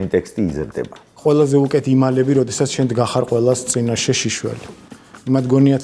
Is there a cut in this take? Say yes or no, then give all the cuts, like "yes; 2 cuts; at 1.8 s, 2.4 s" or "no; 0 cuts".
yes; 1 cut; at 1.2 s